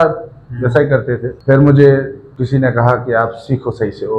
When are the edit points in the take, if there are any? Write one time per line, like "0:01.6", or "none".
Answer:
0:01.3
0:02.2